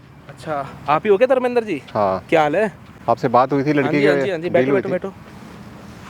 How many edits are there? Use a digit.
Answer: 0